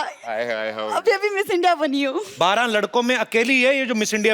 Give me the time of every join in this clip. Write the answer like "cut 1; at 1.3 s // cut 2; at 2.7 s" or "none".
cut 1; at 2.3 s